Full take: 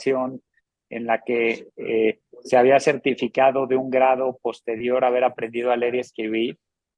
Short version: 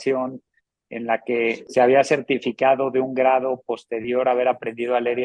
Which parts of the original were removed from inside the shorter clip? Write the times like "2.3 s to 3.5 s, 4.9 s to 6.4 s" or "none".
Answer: 1.6 s to 2.4 s